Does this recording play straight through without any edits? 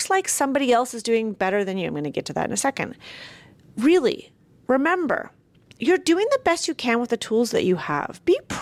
yes; 0 cuts

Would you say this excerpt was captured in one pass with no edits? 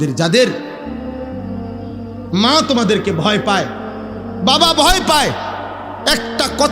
no; 2 cuts; at 0.8 s, 2.3 s

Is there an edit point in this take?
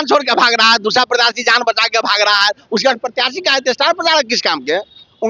no; 0 cuts

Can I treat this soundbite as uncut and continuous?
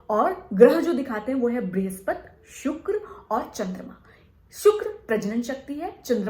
yes; 0 cuts

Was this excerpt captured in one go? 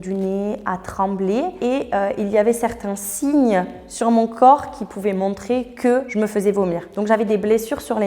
yes; 0 cuts

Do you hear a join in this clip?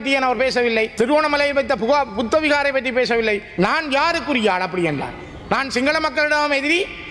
yes; 2 cuts; at 0.9 s, 3.5 s

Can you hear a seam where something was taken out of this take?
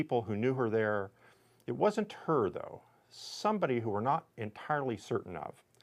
no; 0 cuts

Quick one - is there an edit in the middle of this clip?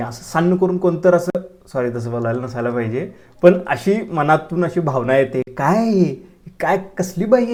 no; 0 cuts

